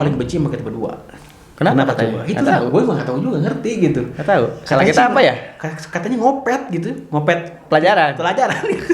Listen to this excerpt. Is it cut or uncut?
uncut